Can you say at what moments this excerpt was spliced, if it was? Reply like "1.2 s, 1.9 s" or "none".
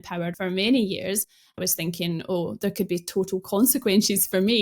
1.5 s